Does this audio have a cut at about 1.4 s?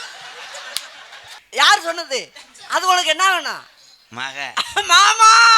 yes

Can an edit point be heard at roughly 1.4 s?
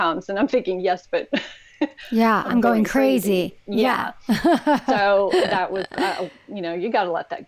no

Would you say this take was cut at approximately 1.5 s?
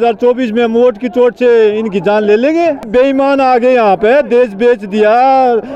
no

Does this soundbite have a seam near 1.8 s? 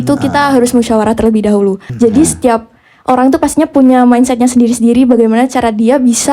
yes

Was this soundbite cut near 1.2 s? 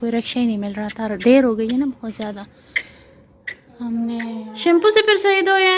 no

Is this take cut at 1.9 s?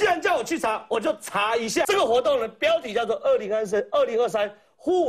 yes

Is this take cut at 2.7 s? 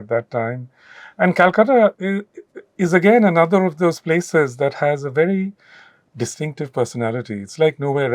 no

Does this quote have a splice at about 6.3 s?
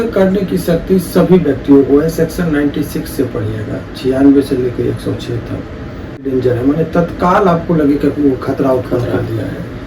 yes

